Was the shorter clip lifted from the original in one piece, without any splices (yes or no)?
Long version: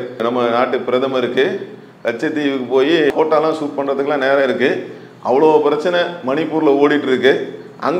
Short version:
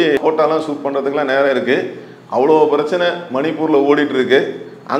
yes